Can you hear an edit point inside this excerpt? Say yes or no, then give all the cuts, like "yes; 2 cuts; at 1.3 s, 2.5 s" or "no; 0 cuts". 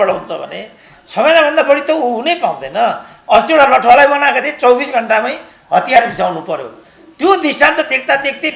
no; 0 cuts